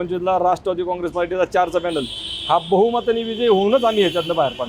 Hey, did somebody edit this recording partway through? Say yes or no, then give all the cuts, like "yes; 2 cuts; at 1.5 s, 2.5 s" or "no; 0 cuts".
no; 0 cuts